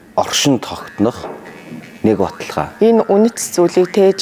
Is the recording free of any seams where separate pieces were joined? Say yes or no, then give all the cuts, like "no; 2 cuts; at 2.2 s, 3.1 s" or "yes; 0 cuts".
no; 1 cut; at 2.6 s